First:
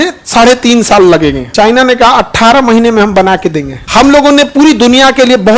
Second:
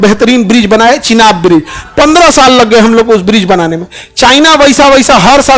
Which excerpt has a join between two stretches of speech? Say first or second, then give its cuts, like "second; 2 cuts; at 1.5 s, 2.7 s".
first; 2 cuts; at 1.4 s, 3.8 s